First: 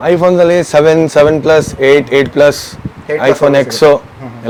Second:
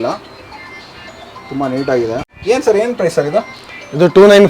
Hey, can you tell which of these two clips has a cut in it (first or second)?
second